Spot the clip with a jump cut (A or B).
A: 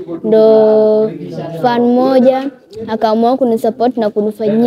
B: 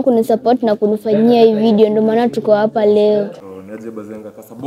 B